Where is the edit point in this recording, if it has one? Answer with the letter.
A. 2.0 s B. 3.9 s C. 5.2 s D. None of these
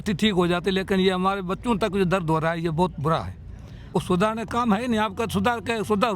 B